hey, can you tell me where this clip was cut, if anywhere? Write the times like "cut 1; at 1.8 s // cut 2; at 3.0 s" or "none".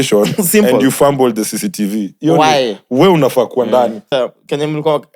cut 1; at 4.0 s